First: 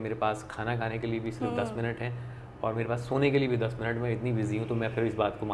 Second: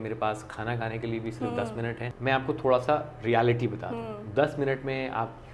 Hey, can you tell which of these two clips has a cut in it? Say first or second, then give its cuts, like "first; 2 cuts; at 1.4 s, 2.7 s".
second; 1 cut; at 2.1 s